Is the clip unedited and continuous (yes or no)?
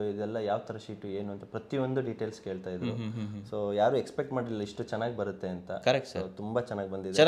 yes